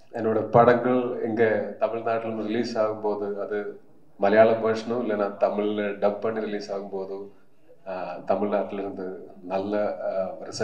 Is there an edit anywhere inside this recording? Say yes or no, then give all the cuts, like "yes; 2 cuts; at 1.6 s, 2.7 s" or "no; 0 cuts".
no; 0 cuts